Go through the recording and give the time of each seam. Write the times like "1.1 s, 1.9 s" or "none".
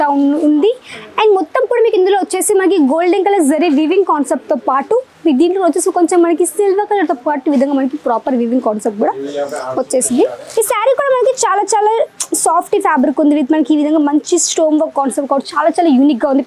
10.4 s